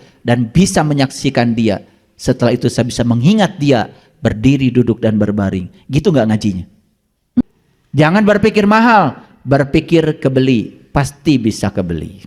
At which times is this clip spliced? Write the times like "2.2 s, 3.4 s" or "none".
7.4 s